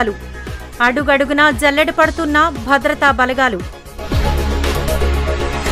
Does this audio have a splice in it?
yes; 1 cut; at 4.7 s

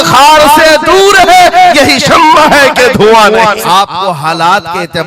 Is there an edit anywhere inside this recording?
yes; 1 cut; at 3.6 s

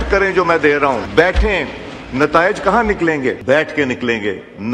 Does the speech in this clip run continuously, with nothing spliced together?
no; 2 cuts; at 1.1 s, 3.4 s

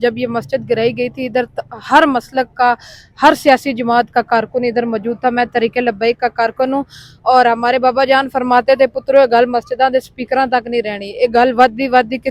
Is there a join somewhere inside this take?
no; 0 cuts

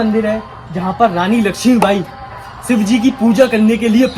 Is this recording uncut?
yes; 0 cuts

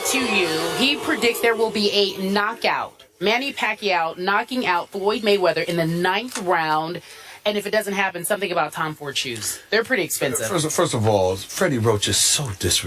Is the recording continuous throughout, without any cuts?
no; 1 cut; at 6.7 s

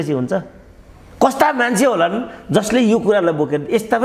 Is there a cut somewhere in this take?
no; 0 cuts

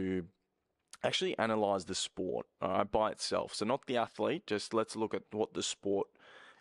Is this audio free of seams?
yes; 0 cuts

